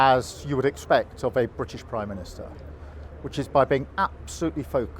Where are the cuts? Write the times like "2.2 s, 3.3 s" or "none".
none

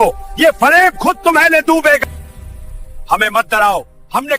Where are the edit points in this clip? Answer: 2.0 s

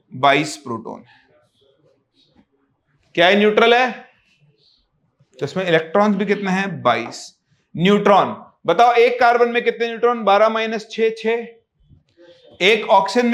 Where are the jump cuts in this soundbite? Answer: none

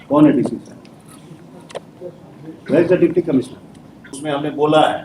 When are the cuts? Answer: 4.2 s

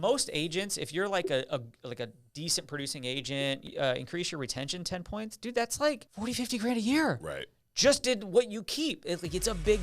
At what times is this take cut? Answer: 3.7 s, 6.1 s

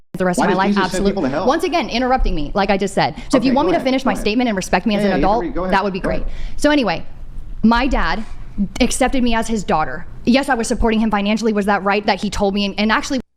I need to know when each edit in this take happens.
none

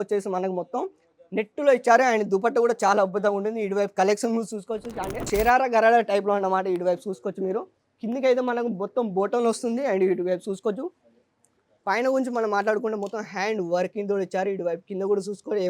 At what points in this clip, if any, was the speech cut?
5.3 s

